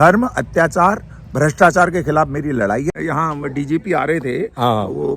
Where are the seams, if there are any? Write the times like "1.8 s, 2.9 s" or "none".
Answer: 3.0 s